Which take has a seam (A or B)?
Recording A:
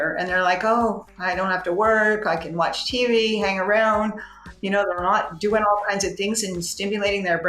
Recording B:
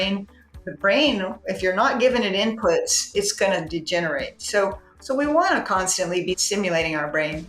B